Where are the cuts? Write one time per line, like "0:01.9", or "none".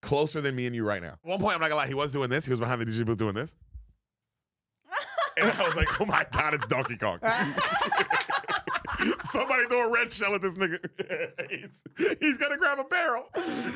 0:01.3